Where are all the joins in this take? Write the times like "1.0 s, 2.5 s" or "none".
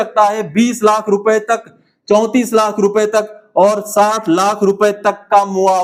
none